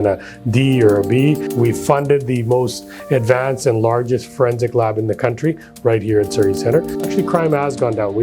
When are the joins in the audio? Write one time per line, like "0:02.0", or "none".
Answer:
0:01.5
0:07.1

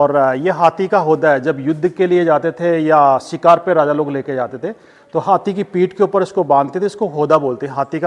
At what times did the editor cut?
none

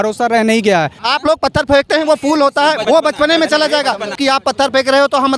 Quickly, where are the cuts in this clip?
0:01.0
0:02.8
0:04.2

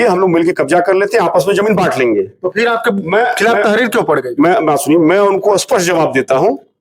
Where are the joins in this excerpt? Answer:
none

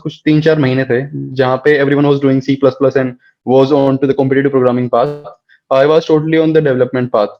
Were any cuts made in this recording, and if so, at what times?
none

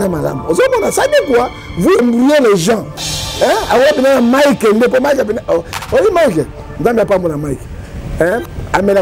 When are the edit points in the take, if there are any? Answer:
0:02.0

